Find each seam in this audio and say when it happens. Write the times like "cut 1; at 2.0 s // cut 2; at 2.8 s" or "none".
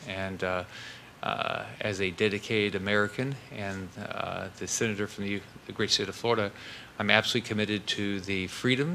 none